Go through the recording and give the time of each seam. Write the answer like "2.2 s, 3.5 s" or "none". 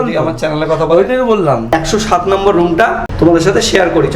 1.7 s, 3.1 s

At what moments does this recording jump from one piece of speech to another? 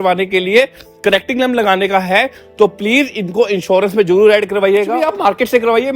5.0 s

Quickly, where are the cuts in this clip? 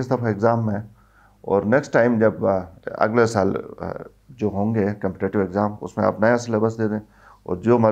none

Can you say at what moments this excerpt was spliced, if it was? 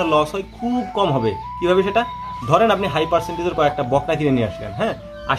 none

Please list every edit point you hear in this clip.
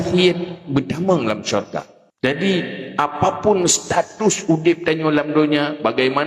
2.0 s

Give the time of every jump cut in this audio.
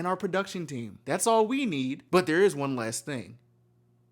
0.9 s, 2.0 s

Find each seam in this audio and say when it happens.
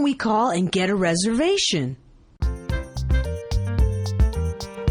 2.0 s

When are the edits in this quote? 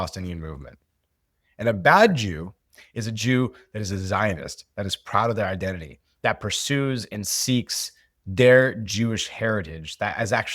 none

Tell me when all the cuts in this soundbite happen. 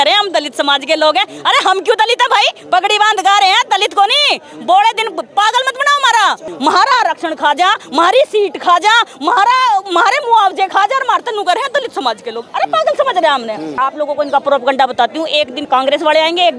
6.5 s, 13.7 s, 15.7 s

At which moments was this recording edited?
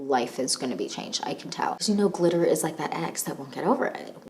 1.8 s

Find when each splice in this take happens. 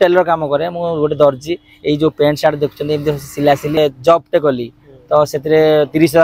3.8 s

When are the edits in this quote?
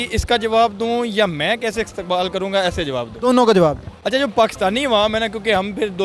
none

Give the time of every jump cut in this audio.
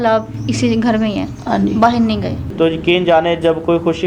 2.4 s

